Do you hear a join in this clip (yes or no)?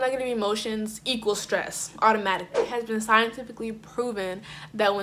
yes